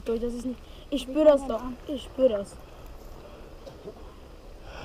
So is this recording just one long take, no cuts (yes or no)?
yes